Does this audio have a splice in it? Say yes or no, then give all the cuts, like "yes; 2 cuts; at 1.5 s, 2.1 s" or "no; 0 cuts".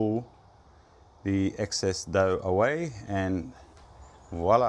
no; 0 cuts